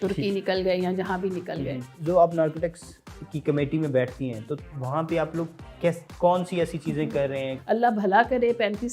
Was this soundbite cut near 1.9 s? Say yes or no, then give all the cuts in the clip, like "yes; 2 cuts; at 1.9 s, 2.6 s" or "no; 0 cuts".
yes; 2 cuts; at 1.9 s, 7.5 s